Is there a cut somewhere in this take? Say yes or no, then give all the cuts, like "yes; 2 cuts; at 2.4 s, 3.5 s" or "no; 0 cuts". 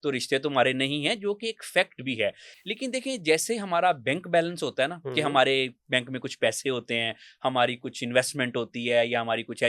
no; 0 cuts